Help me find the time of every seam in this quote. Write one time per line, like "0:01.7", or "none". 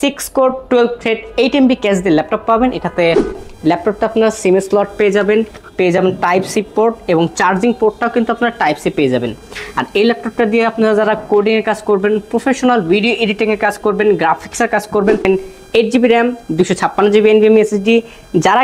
0:03.5
0:15.3